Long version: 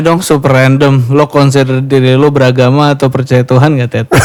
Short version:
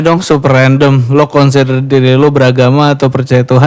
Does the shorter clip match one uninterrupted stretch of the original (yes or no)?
yes